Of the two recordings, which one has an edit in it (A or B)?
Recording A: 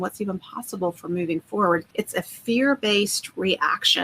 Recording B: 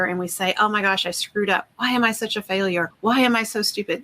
A